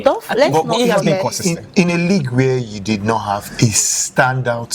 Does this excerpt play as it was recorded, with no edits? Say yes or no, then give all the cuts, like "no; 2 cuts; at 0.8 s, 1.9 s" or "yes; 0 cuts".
yes; 0 cuts